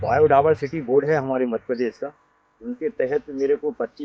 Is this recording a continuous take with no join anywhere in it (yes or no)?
yes